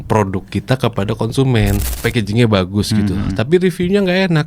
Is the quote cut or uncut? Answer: cut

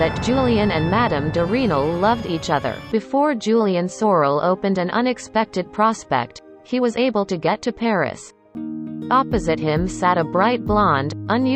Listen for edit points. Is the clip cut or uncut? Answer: cut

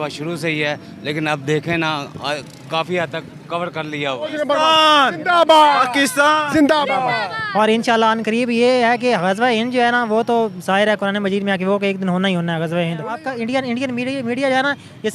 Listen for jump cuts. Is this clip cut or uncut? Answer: cut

